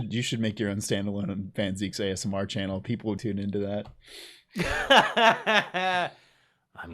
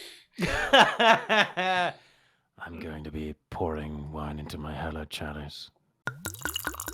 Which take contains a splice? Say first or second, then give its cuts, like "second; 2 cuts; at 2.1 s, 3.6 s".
first; 1 cut; at 3.2 s